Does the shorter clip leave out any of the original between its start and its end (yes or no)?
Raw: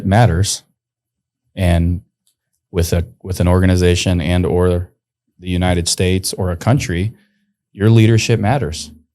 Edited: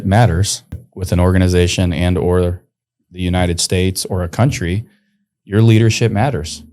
yes